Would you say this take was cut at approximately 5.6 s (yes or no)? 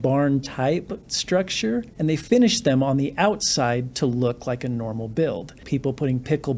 yes